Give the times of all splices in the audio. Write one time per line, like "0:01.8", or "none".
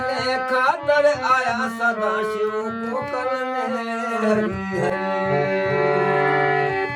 none